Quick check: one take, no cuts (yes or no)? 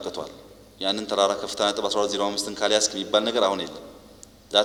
yes